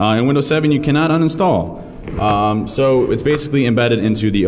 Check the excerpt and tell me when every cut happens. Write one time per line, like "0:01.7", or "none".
0:03.1